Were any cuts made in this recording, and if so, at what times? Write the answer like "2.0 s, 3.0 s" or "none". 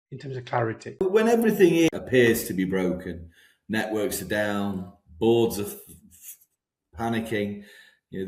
1.0 s, 1.9 s